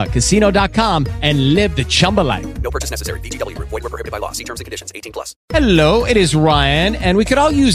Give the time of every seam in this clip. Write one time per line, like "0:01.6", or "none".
0:05.4